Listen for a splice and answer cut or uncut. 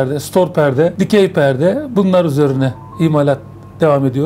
cut